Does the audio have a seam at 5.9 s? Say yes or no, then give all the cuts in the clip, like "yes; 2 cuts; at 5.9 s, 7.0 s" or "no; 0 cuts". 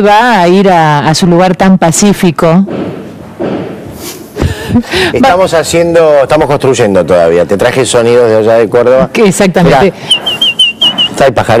no; 1 cut; at 7.9 s